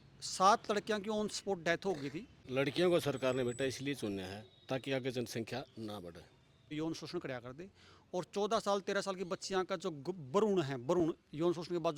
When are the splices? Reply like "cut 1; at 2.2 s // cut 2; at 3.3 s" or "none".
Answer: cut 1; at 2.3 s // cut 2; at 6.7 s

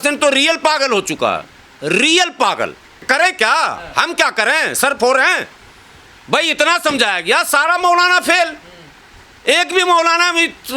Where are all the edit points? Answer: cut 1; at 3.0 s

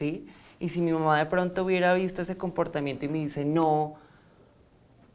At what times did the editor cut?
none

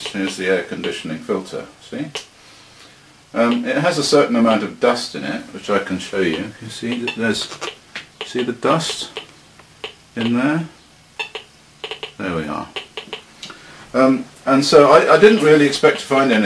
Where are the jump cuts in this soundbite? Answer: cut 1; at 9.4 s

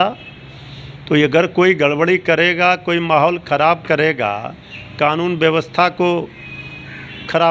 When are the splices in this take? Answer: none

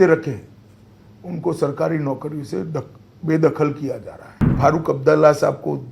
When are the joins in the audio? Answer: cut 1; at 4.5 s

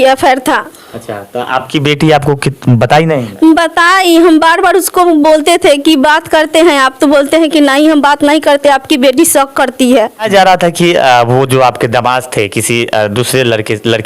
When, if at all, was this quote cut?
cut 1; at 10.3 s

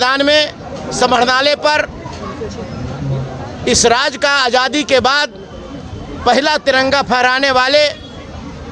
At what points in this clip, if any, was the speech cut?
none

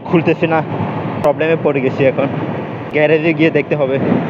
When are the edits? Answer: cut 1; at 2.9 s

